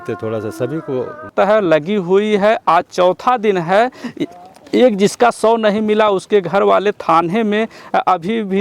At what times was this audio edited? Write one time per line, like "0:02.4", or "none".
0:01.3